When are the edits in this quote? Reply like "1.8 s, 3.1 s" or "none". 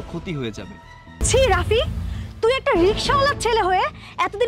1.2 s